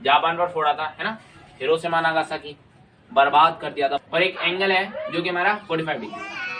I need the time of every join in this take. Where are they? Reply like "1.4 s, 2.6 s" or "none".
4.0 s